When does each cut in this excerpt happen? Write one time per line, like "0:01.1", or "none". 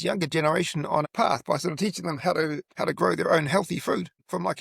0:01.0